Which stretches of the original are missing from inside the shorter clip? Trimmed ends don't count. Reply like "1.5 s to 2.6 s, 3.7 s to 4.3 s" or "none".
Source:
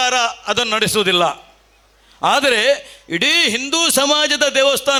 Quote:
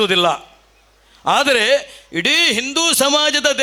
none